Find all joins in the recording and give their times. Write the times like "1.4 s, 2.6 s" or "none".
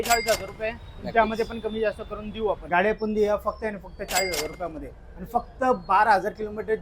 2.6 s